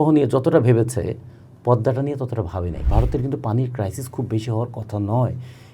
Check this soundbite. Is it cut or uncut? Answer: cut